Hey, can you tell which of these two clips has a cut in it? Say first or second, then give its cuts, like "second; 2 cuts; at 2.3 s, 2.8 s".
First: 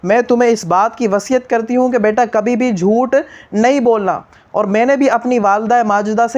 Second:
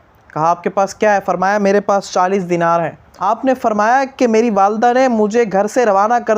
second; 1 cut; at 3.1 s